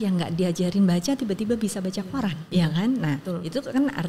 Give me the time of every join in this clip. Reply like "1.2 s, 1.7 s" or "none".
2.4 s